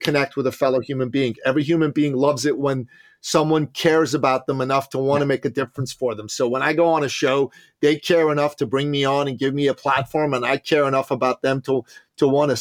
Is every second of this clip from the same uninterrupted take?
yes; 0 cuts

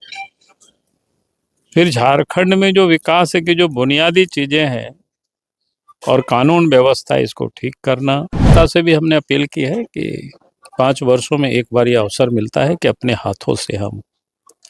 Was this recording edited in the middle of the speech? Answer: yes; 1 cut; at 8.5 s

